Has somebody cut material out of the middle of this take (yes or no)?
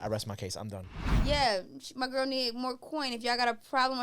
yes